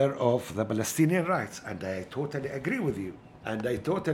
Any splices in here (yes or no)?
no